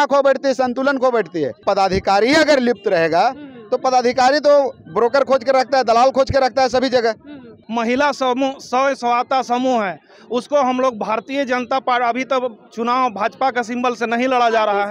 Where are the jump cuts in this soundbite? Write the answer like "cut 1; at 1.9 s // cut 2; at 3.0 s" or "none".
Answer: cut 1; at 1.6 s // cut 2; at 7.6 s

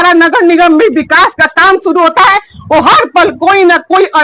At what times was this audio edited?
none

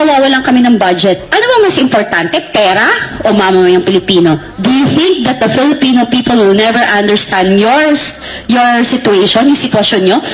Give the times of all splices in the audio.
none

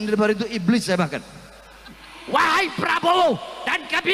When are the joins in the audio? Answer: cut 1; at 2.1 s

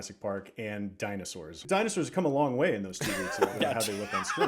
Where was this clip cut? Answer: cut 1; at 1.5 s

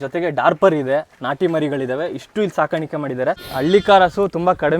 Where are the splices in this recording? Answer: cut 1; at 3.4 s

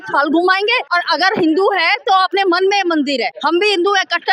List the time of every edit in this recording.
cut 1; at 0.8 s // cut 2; at 3.3 s

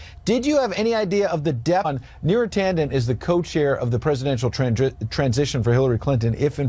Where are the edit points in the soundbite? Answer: none

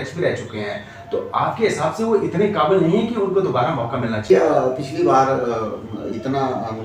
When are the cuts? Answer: cut 1; at 4.2 s

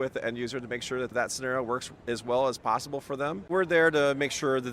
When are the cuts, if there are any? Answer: cut 1; at 1.1 s // cut 2; at 3.5 s

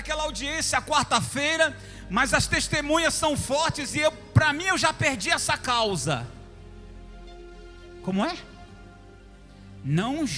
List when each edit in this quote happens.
none

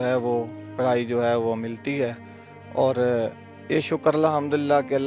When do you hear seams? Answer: none

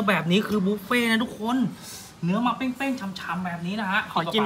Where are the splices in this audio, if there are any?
none

